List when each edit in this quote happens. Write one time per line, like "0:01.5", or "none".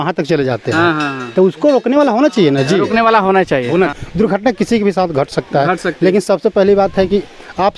0:04.0